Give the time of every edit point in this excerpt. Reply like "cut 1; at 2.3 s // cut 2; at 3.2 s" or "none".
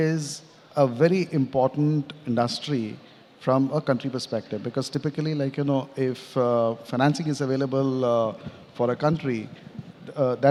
none